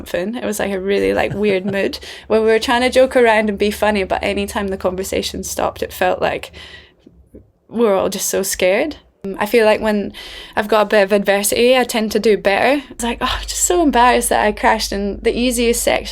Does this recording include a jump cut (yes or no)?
yes